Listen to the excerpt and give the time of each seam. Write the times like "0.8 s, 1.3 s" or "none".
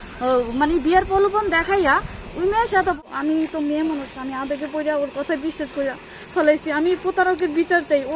3.0 s